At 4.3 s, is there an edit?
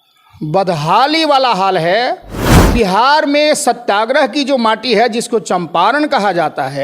no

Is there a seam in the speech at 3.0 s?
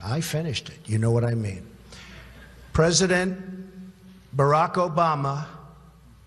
yes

